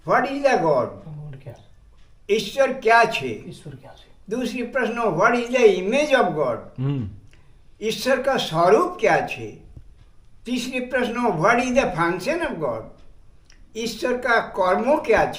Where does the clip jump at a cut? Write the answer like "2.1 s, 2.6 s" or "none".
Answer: none

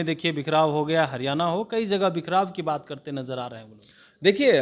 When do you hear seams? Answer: none

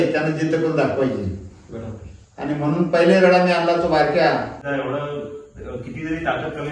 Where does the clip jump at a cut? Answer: 4.6 s

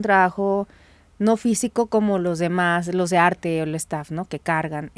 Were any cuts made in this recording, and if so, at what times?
none

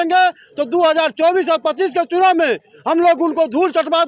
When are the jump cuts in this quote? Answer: none

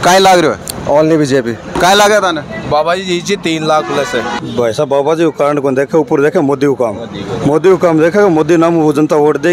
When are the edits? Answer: 1.7 s, 4.4 s

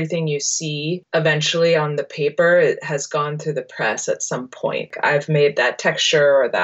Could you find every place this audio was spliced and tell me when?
1.0 s, 4.9 s

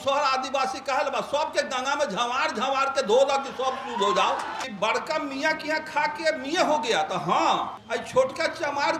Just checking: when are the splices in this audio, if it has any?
4.6 s, 7.8 s

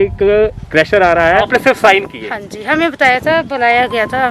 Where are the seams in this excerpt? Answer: 1.5 s

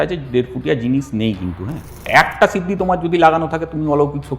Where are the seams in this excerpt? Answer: 2.1 s

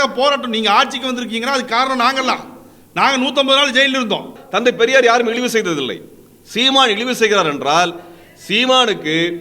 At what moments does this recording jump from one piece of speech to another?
4.4 s

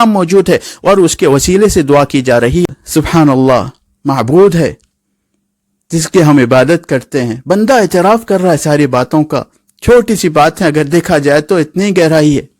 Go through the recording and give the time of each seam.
2.6 s

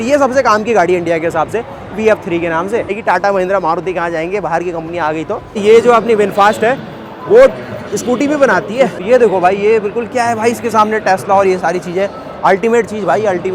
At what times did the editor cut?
3.0 s, 5.6 s, 9.0 s

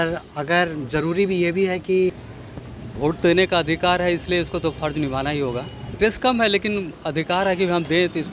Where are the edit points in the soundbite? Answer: 2.2 s, 5.9 s

